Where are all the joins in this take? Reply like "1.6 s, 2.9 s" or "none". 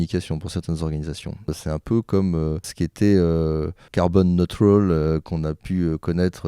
1.5 s, 2.7 s, 3.8 s